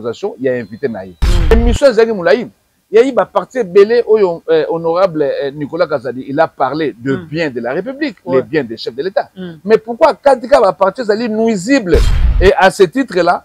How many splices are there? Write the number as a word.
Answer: two